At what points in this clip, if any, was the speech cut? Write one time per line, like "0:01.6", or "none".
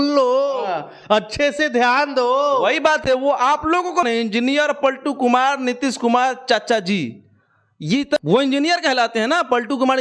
0:04.0
0:08.2